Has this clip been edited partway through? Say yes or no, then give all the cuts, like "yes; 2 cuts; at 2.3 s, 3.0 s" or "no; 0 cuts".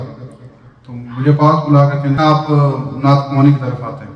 yes; 1 cut; at 2.2 s